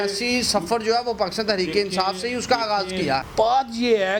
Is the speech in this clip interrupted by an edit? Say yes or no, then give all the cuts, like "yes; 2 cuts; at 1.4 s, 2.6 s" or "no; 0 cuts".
yes; 1 cut; at 3.3 s